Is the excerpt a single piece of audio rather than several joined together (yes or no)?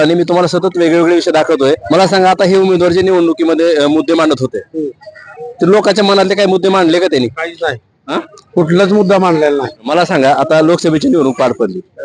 no